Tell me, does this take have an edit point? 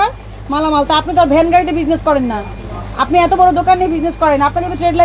no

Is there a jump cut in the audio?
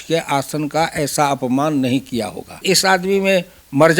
yes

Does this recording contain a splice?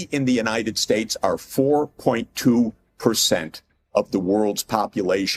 no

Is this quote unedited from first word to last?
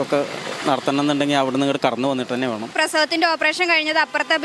no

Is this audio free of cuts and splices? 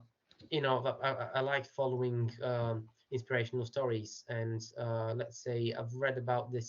yes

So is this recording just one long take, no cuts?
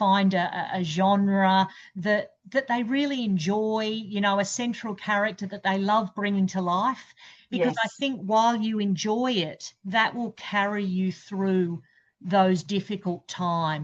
yes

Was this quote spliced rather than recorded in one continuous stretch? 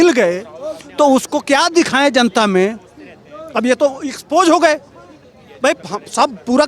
no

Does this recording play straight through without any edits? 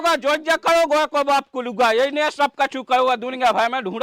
yes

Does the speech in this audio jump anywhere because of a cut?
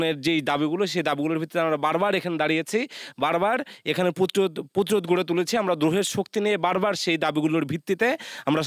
no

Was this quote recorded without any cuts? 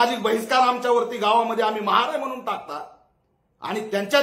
yes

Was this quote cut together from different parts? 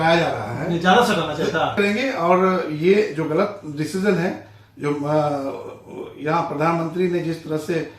yes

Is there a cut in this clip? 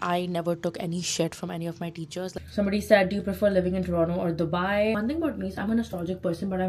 yes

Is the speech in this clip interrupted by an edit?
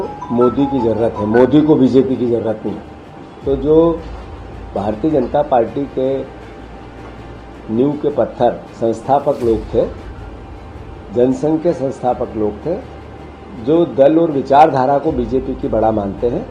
no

